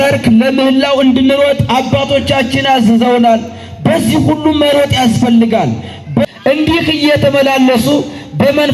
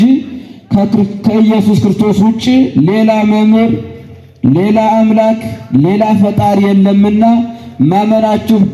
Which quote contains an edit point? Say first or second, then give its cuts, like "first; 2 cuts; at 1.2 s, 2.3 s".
first; 1 cut; at 6.2 s